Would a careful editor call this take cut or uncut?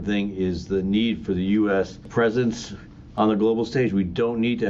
cut